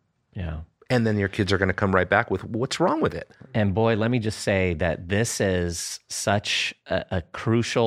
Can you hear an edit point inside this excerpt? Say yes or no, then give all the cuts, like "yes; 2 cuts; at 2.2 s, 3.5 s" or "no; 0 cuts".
no; 0 cuts